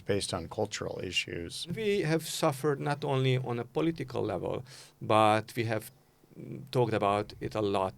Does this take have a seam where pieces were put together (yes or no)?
yes